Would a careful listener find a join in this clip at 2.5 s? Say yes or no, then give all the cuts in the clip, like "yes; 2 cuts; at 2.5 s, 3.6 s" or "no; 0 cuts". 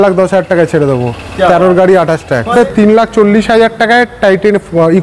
yes; 1 cut; at 2.5 s